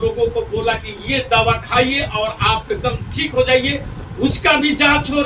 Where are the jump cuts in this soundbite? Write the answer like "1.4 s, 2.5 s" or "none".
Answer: none